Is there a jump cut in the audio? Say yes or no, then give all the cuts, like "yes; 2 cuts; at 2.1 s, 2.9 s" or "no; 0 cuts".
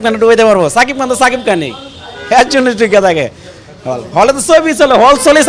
no; 0 cuts